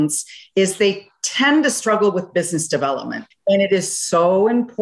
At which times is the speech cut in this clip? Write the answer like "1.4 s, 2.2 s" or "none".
3.3 s